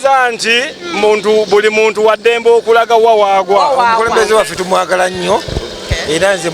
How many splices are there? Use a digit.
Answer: 1